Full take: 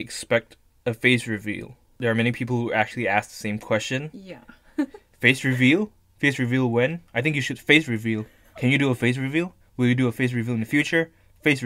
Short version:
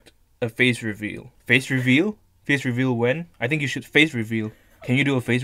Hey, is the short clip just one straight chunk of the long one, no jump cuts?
no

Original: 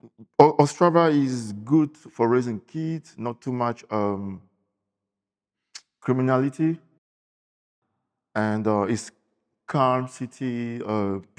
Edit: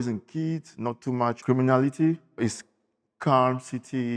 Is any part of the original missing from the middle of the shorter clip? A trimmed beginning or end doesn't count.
yes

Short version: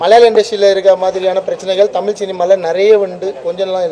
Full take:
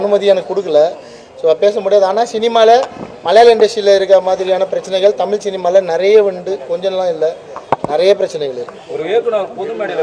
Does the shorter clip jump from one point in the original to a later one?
no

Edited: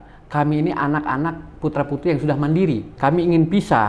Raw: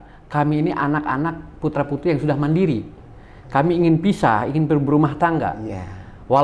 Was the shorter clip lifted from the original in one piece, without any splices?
no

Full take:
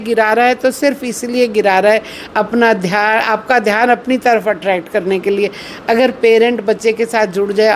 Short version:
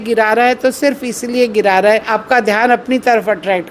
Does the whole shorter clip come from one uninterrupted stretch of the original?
no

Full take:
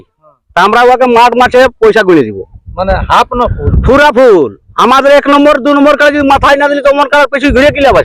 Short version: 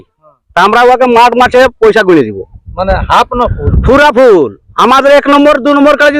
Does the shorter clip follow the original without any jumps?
yes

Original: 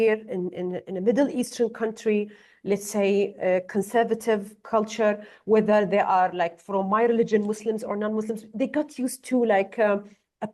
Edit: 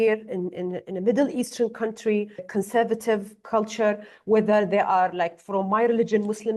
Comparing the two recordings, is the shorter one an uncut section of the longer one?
no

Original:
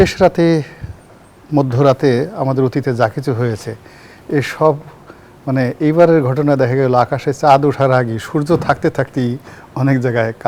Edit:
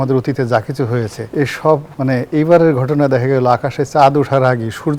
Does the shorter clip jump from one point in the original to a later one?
yes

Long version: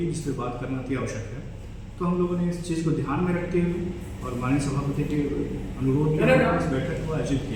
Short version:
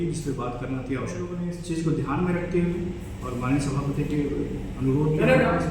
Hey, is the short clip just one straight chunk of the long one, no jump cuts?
no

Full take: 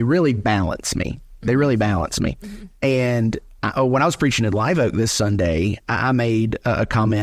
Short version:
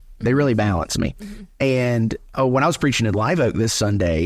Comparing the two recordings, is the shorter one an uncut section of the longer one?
no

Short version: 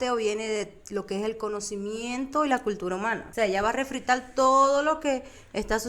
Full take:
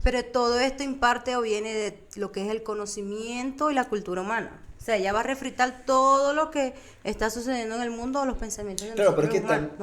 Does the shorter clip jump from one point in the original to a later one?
yes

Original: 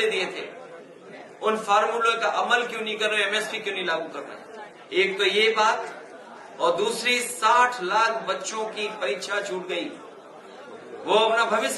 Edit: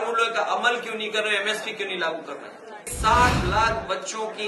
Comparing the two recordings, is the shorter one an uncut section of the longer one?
no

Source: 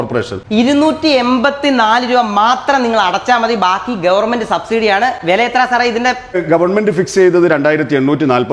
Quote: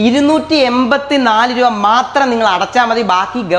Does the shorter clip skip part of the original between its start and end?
no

